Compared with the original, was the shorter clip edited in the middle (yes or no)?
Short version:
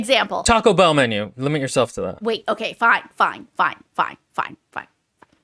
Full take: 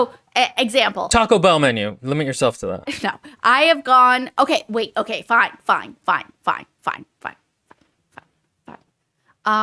yes